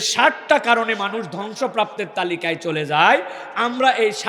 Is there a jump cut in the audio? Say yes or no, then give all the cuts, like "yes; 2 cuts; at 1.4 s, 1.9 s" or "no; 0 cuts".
no; 0 cuts